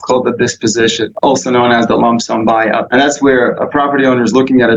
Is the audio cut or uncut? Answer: cut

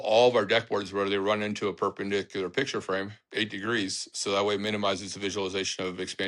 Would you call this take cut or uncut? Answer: uncut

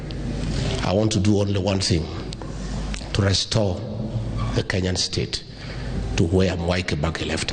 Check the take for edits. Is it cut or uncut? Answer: uncut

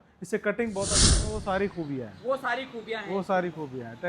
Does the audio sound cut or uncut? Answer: cut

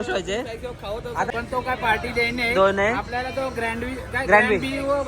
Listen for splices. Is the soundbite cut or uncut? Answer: cut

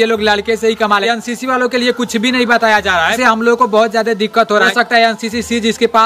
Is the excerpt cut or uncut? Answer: cut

